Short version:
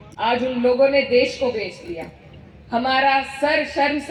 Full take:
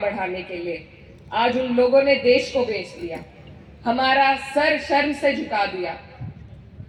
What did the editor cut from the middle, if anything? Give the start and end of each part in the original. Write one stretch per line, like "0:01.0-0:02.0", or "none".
none